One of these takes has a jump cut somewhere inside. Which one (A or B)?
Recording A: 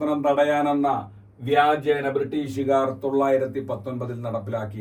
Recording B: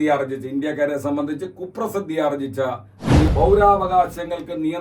B